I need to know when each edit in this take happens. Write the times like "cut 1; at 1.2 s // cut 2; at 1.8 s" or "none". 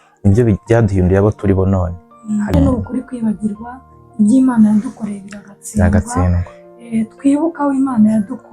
cut 1; at 2.5 s